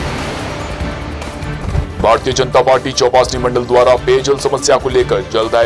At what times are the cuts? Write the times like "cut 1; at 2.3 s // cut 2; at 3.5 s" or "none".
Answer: cut 1; at 1.5 s